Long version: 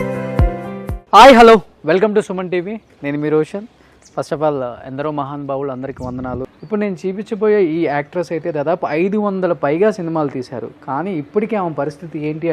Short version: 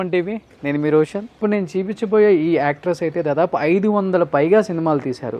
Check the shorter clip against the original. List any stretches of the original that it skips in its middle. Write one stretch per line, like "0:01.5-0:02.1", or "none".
0:03.7-0:06.6